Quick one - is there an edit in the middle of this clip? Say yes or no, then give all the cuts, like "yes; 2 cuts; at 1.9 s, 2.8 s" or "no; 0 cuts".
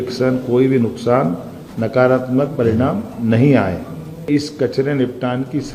yes; 1 cut; at 4.3 s